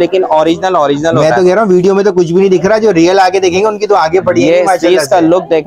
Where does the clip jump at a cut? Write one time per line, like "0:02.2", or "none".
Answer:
none